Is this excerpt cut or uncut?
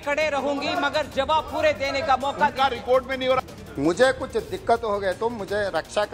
cut